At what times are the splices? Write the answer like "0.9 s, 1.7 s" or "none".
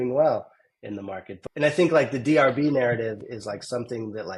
1.2 s